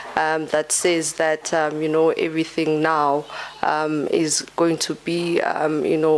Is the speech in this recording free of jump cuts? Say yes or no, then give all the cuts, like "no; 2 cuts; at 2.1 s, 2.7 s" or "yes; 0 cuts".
yes; 0 cuts